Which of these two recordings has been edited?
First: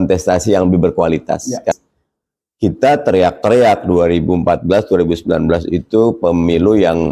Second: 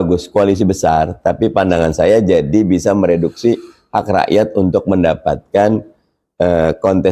first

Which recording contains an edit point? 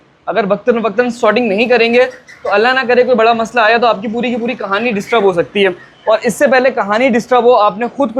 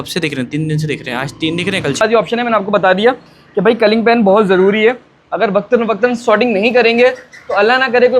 second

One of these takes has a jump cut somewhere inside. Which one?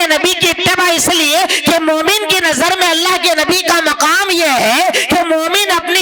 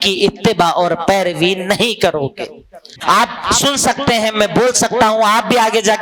second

